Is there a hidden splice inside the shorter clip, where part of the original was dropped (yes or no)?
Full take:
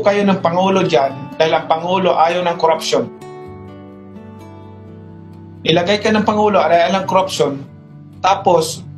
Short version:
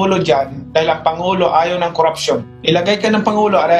yes